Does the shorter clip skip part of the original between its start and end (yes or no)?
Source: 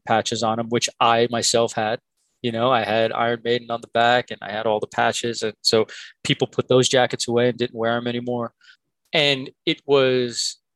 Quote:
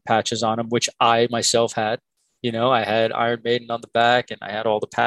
no